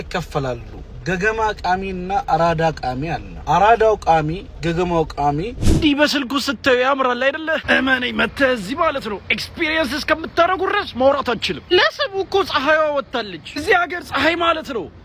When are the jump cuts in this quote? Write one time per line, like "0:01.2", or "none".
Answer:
0:03.3
0:04.5
0:05.6